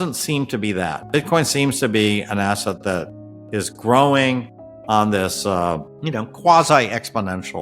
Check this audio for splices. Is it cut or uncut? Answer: cut